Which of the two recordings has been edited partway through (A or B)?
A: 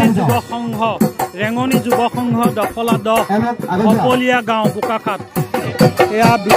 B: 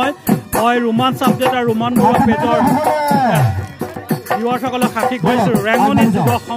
A